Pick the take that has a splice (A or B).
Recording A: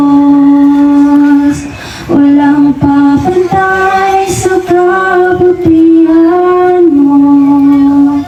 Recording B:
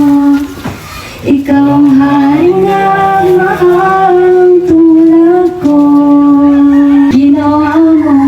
B